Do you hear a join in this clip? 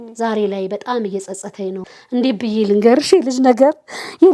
yes; 1 cut; at 1.8 s

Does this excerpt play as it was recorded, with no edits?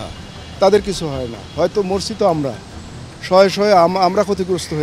yes; 0 cuts

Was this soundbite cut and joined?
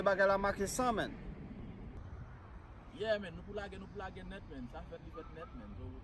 no; 0 cuts

